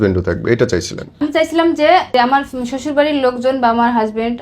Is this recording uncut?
no; 2 cuts; at 1.2 s, 2.1 s

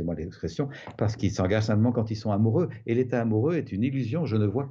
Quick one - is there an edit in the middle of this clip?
no; 0 cuts

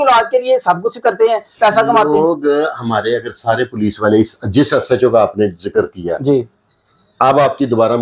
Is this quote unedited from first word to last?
yes; 0 cuts

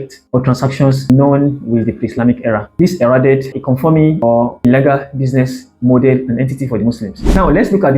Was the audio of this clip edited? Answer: no; 0 cuts

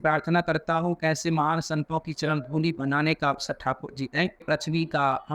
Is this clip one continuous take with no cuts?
no; 1 cut; at 4.4 s

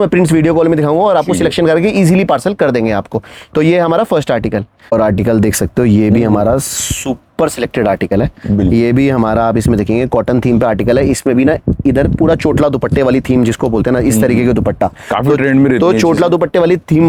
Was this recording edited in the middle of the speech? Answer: no; 0 cuts

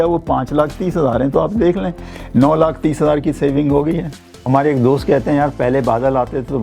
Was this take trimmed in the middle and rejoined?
yes; 1 cut; at 4.5 s

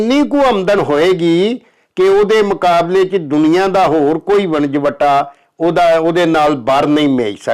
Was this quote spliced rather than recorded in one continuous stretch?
no; 0 cuts

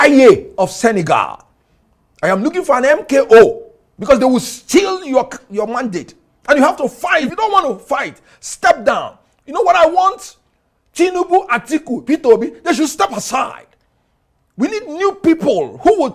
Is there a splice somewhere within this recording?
yes; 1 cut; at 7.3 s

